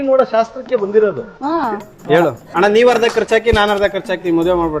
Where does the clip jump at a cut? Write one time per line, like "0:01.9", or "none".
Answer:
0:02.5